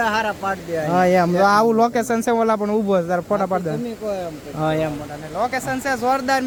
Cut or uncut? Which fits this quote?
uncut